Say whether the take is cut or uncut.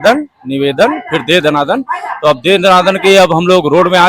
uncut